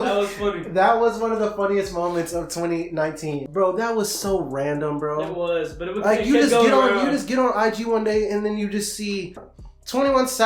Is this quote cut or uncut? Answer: uncut